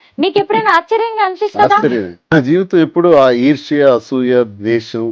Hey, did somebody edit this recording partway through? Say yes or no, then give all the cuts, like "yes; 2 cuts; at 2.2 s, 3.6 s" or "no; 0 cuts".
yes; 1 cut; at 2.3 s